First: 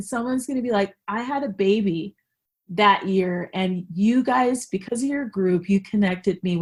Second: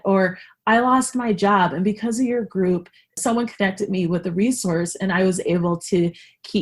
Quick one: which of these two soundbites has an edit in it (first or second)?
second